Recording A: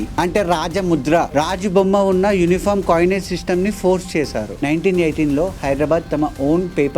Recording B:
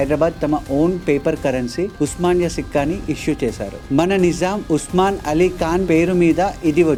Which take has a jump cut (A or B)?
A